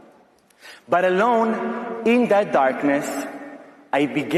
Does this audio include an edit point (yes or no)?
no